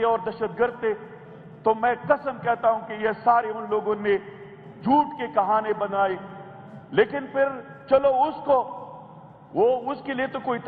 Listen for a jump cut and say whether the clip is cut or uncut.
uncut